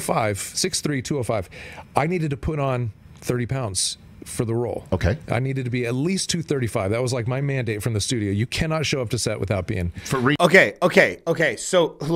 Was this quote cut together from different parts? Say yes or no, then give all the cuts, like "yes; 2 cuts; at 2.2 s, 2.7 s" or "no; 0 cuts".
no; 0 cuts